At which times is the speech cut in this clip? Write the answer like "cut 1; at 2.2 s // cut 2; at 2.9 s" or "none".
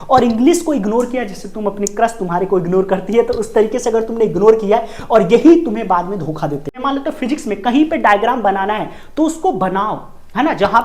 cut 1; at 6.8 s